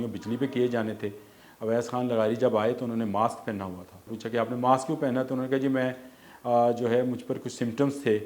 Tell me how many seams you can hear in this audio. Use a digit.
1